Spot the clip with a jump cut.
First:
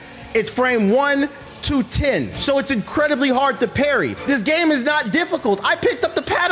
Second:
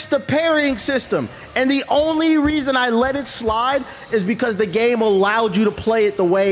first; 2 cuts; at 2.3 s, 4.2 s

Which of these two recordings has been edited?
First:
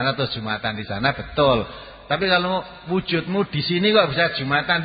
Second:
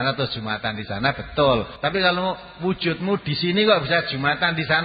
second; 1 cut; at 1.7 s

